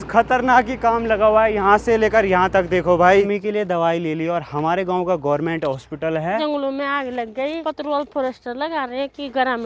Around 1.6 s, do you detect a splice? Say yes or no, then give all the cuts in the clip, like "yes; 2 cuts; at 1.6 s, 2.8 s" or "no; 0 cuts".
no; 3 cuts; at 3.3 s, 6.4 s, 7.6 s